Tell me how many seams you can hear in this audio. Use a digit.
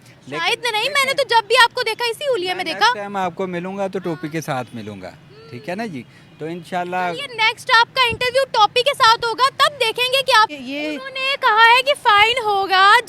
1